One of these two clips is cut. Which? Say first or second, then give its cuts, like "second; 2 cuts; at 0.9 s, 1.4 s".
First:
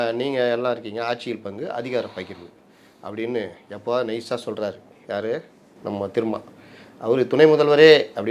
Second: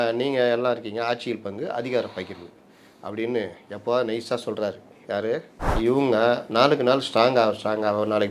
second; 1 cut; at 5.8 s